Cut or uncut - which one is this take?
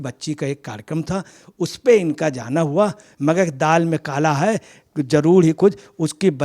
cut